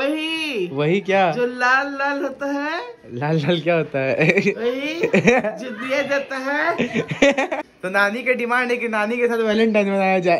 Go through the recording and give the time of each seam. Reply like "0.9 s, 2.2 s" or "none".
7.6 s